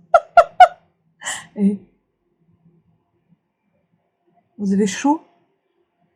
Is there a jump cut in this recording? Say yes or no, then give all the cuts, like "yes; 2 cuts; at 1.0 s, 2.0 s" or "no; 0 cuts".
no; 0 cuts